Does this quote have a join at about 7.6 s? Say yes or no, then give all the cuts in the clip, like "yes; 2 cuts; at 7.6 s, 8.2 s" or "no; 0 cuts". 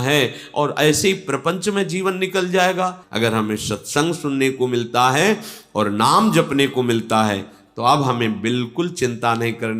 no; 1 cut; at 3.0 s